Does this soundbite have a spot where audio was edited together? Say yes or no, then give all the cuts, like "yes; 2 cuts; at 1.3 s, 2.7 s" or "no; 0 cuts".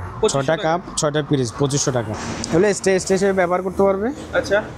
yes; 1 cut; at 2.1 s